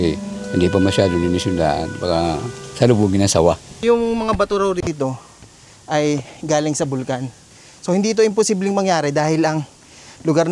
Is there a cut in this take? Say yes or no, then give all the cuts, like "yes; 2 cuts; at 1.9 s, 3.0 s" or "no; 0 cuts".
yes; 1 cut; at 3.7 s